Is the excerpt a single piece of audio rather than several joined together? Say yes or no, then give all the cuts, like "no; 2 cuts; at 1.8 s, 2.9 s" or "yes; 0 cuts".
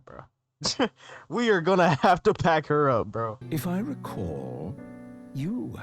no; 1 cut; at 3.4 s